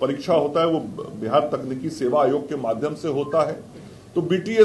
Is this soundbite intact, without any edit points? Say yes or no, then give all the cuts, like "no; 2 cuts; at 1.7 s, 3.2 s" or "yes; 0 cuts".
yes; 0 cuts